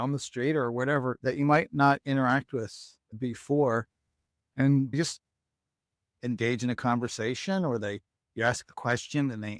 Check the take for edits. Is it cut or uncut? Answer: cut